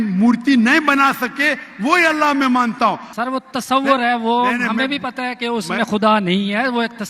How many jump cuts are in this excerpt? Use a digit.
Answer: 1